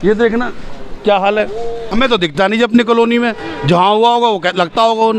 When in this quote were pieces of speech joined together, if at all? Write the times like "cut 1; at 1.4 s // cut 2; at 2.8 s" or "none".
cut 1; at 1.9 s

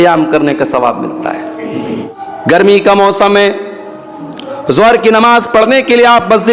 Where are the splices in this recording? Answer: cut 1; at 2.1 s

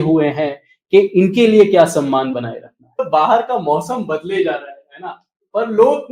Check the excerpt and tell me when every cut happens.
cut 1; at 3.1 s

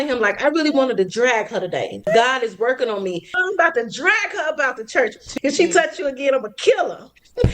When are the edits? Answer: cut 1; at 2.1 s // cut 2; at 3.4 s // cut 3; at 5.3 s

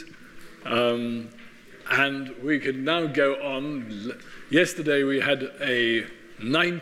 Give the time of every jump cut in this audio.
cut 1; at 3.3 s

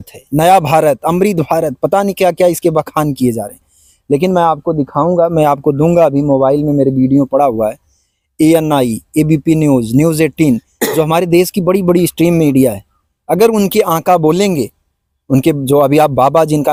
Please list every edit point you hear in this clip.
none

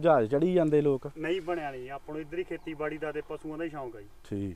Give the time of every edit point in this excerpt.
none

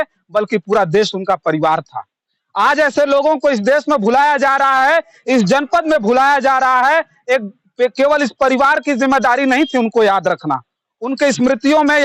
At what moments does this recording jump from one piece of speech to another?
none

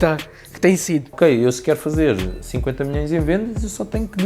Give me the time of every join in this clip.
cut 1; at 1.1 s

